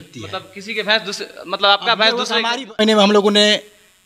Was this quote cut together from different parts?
yes; 1 cut; at 2.8 s

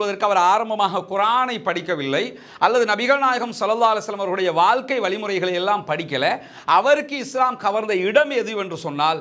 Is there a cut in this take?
no; 0 cuts

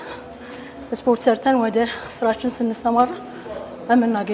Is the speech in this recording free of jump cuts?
yes; 0 cuts

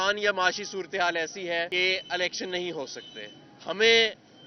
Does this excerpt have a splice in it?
yes; 1 cut; at 1.7 s

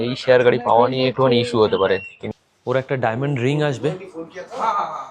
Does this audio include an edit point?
yes; 1 cut; at 2.2 s

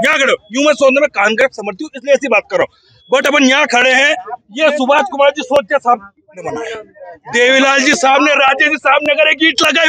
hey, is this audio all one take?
yes; 0 cuts

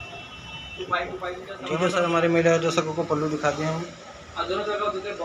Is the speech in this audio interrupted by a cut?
yes; 1 cut; at 1.7 s

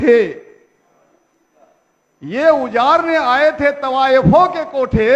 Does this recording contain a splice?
no; 0 cuts

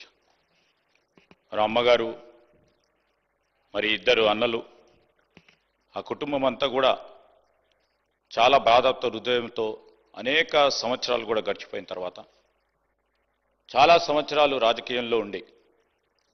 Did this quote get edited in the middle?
no; 0 cuts

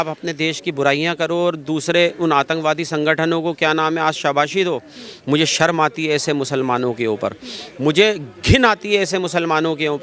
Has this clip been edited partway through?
no; 0 cuts

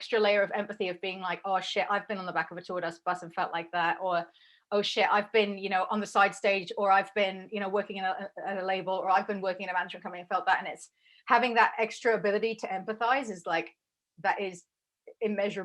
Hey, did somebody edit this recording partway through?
no; 0 cuts

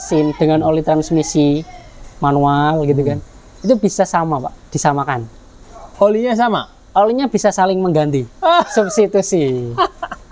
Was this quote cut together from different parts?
no; 0 cuts

